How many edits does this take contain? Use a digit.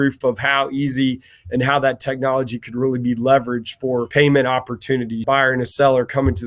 2